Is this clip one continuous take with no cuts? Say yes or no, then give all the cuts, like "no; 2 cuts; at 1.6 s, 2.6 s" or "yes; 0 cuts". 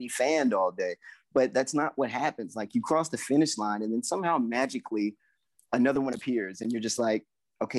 yes; 0 cuts